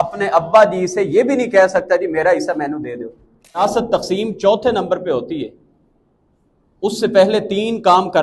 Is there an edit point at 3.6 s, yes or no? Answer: yes